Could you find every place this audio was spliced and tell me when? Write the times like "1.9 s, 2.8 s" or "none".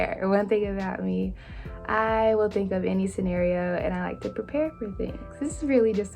5.2 s